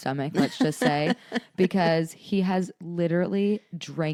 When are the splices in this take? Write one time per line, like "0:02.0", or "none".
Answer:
none